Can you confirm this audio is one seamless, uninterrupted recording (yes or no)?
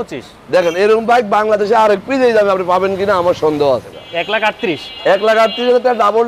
no